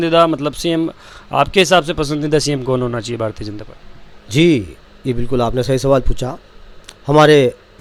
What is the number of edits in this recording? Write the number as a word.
zero